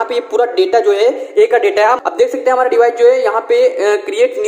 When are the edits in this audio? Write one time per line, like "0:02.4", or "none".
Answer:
0:02.0